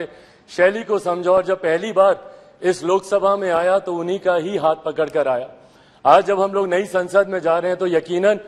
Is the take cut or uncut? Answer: uncut